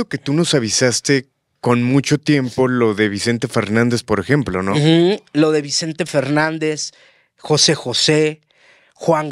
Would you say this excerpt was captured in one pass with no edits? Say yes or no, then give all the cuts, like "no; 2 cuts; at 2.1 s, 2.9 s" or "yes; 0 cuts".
yes; 0 cuts